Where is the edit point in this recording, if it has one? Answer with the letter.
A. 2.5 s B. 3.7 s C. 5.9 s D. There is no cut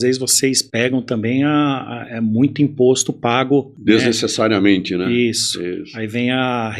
B